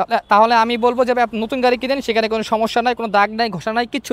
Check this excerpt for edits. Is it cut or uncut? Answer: uncut